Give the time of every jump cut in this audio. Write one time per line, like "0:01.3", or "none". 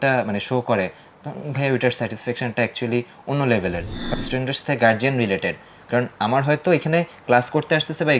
0:04.0